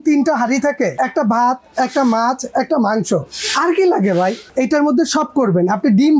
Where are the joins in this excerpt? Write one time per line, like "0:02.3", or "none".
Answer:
0:00.9
0:04.4